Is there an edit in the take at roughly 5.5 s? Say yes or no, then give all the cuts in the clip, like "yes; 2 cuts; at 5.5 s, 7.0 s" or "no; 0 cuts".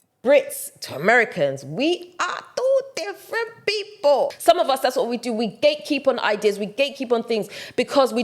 no; 1 cut; at 4.3 s